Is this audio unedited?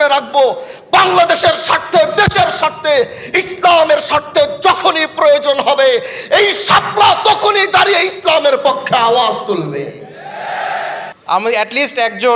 no; 1 cut; at 11.1 s

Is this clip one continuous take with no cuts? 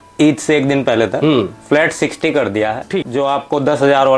no; 1 cut; at 3.0 s

